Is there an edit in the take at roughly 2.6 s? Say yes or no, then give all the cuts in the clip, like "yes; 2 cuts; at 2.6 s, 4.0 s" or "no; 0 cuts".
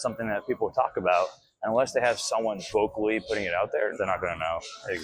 yes; 1 cut; at 2.6 s